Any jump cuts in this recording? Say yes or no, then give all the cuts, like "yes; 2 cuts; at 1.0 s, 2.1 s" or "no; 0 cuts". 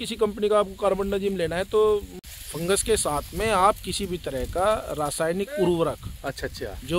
yes; 1 cut; at 2.1 s